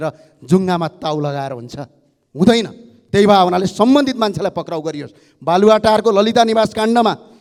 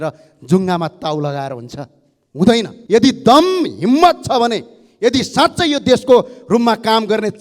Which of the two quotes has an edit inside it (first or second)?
second